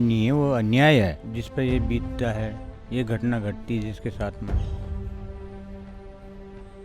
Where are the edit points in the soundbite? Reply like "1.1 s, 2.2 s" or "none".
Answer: 1.2 s